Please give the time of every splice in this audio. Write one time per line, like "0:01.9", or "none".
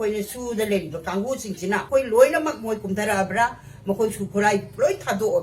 0:01.9